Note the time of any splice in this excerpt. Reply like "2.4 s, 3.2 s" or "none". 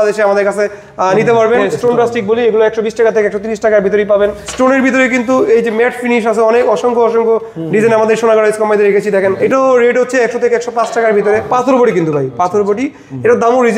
1.7 s, 4.4 s, 9.4 s, 11.5 s